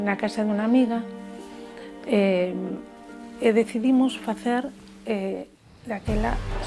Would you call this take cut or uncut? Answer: uncut